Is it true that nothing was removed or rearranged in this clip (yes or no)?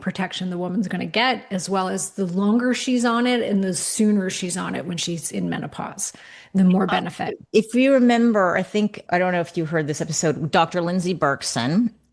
yes